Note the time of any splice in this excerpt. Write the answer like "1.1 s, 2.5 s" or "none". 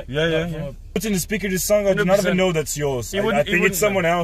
1.0 s